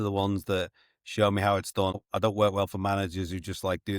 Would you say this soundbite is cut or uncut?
cut